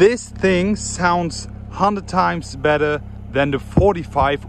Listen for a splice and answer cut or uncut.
uncut